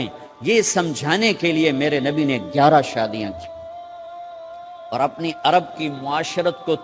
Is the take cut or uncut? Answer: cut